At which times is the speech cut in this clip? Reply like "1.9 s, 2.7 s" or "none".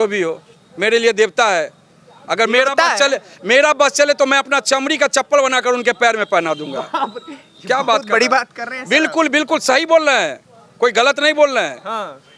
none